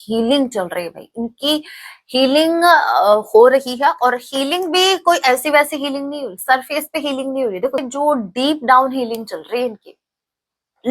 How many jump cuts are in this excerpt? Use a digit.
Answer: 1